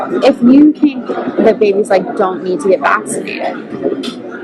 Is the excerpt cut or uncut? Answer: uncut